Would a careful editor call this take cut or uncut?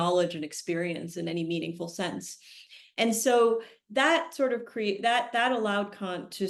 uncut